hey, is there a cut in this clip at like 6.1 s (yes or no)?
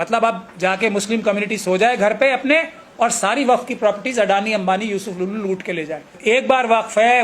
yes